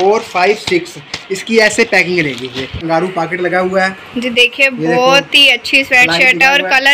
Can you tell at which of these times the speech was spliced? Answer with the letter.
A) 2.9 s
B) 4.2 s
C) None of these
A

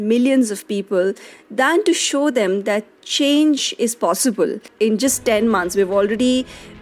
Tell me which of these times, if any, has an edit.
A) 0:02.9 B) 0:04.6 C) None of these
B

